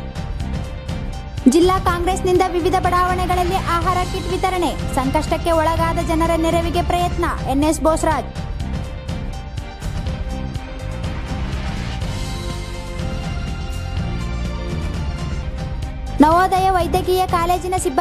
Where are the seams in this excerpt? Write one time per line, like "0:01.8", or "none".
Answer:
0:01.1